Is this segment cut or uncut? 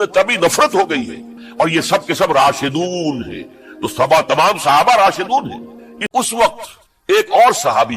cut